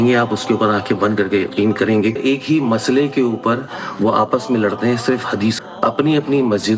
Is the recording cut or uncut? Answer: cut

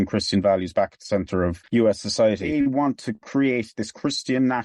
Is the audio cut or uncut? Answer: cut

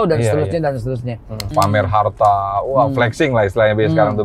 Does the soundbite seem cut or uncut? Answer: cut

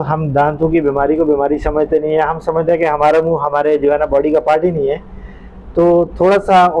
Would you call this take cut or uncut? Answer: uncut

